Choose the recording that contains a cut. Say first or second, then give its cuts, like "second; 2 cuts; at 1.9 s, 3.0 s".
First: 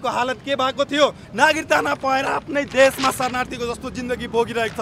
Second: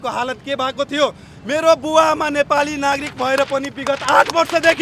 first; 1 cut; at 1.2 s